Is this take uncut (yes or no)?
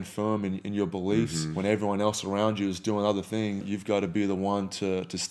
no